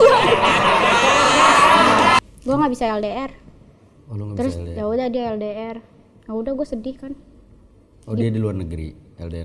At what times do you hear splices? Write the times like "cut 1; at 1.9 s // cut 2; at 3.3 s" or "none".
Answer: cut 1; at 2.2 s

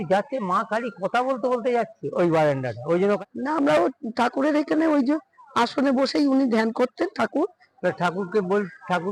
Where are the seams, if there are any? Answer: cut 1; at 3.2 s // cut 2; at 7.5 s

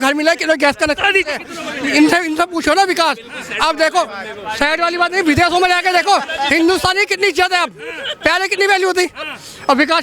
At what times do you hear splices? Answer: none

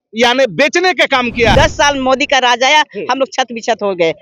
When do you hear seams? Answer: cut 1; at 1.5 s

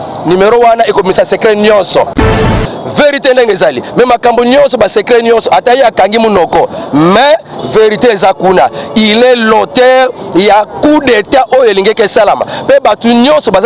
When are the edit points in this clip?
cut 1; at 2.6 s

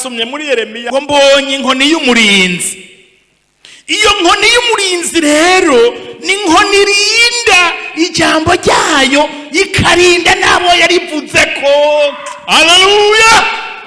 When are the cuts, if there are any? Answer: cut 1; at 0.9 s

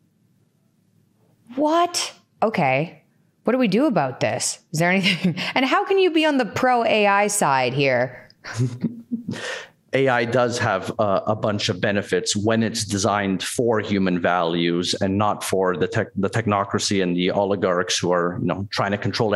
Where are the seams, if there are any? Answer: none

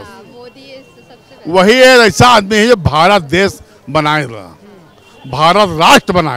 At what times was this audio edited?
none

